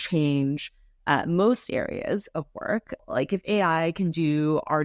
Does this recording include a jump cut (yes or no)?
yes